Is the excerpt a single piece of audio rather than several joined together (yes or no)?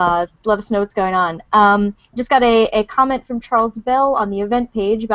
no